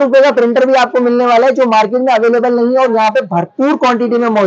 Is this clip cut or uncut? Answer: uncut